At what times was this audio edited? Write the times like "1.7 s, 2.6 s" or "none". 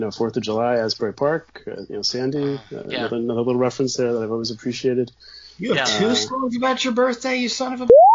none